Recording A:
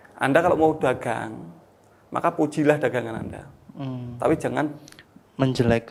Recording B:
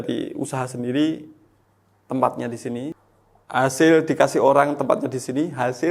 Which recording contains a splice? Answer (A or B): B